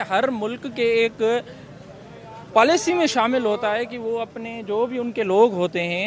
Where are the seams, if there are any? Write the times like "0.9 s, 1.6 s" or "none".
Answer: none